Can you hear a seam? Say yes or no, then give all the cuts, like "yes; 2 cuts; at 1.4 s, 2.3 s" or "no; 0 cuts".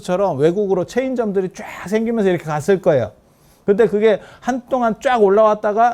no; 0 cuts